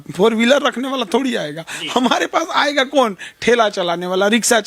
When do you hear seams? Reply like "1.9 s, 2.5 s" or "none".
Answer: none